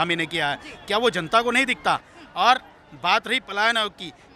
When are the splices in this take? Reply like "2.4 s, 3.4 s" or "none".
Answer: none